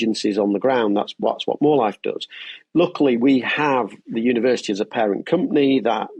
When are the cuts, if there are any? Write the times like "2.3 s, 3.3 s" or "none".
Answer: none